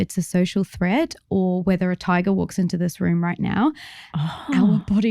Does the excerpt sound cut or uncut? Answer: uncut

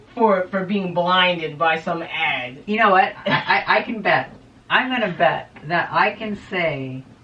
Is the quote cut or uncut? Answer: uncut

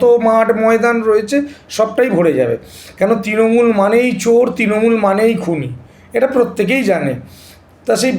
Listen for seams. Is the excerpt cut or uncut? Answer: uncut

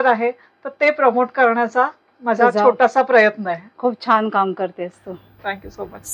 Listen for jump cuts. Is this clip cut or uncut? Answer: uncut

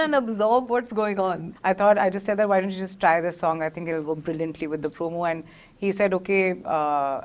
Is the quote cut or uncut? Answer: cut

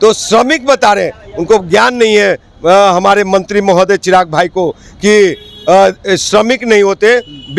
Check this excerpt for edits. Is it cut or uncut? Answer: uncut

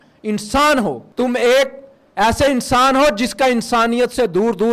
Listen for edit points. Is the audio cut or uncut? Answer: cut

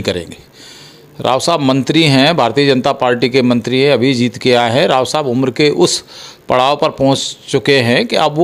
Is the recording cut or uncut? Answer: uncut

